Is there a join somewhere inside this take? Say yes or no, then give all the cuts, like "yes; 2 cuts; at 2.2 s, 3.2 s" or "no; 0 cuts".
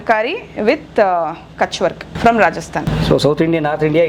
yes; 2 cuts; at 2.1 s, 2.8 s